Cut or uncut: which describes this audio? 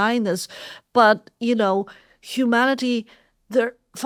uncut